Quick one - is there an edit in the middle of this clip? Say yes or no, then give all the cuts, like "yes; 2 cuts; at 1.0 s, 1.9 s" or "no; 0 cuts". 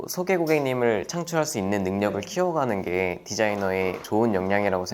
yes; 1 cut; at 4.0 s